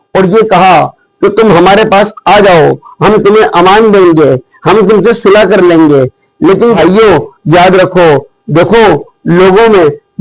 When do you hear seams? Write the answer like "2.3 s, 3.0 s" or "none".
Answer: 6.8 s